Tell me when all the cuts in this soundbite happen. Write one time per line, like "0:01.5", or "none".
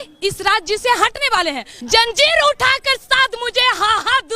0:01.7

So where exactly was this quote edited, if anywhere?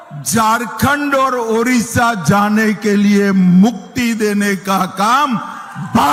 none

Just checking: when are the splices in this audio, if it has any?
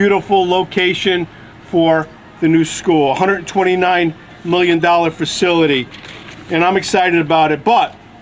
none

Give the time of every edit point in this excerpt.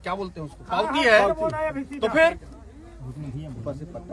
none

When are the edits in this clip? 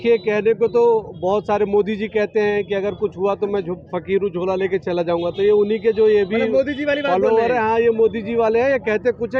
none

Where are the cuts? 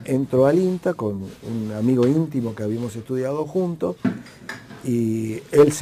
0:03.0

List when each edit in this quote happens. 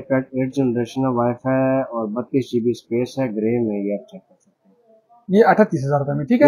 none

